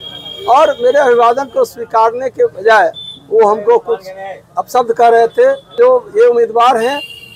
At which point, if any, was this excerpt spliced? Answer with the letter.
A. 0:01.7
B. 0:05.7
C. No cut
B